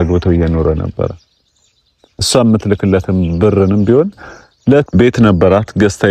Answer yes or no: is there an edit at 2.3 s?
no